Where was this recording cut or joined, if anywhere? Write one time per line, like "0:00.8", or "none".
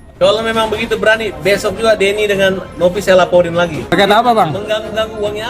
0:03.9